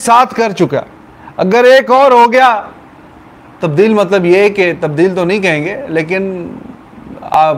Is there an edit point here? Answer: no; 0 cuts

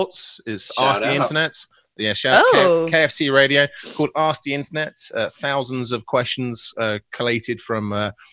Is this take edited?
no; 0 cuts

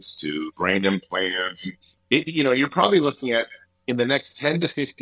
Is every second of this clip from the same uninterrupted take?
no; 1 cut; at 1.9 s

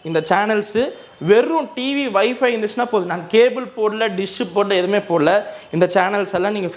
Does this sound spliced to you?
no; 0 cuts

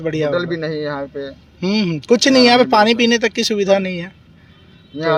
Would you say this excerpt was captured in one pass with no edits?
yes; 0 cuts

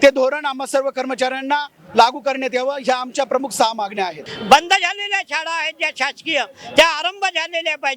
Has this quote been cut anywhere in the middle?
yes; 1 cut; at 4.2 s

